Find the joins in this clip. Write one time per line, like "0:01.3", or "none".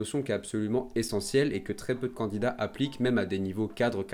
none